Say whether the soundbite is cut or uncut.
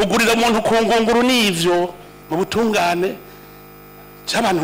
cut